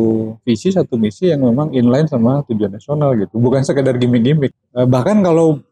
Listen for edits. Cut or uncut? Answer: cut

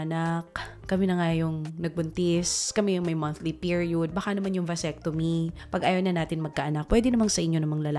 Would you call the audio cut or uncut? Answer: uncut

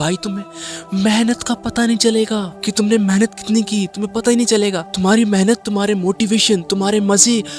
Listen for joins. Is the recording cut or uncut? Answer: cut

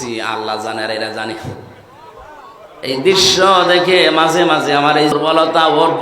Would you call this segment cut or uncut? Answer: cut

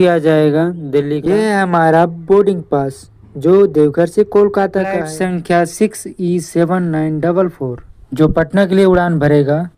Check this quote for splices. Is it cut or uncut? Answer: cut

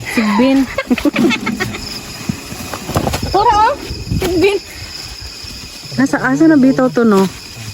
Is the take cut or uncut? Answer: cut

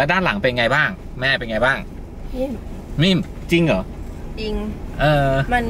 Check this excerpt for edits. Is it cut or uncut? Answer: uncut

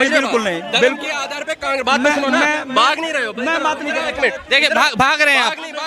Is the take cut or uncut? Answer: uncut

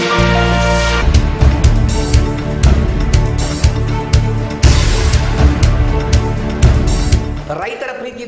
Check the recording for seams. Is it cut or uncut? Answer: cut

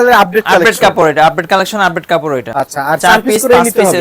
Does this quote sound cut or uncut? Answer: cut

